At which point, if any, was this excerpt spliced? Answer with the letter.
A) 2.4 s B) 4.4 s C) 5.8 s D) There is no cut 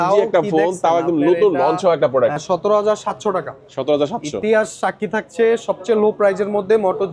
A